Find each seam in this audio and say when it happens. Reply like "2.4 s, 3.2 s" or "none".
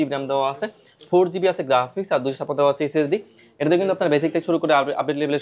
none